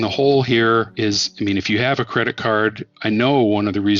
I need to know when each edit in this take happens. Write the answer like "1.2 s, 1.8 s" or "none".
0.9 s, 2.9 s